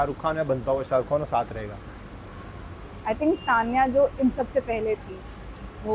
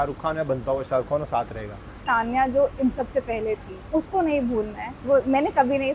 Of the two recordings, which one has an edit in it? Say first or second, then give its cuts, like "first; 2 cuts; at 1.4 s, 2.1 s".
second; 3 cuts; at 2.0 s, 3.8 s, 5.0 s